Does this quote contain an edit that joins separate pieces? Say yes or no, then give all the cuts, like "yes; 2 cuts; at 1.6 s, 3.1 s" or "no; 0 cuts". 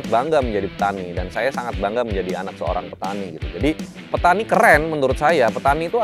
yes; 1 cut; at 3.9 s